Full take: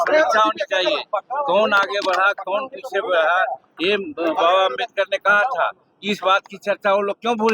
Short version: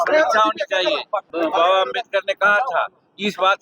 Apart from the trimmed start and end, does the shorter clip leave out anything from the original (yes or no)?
yes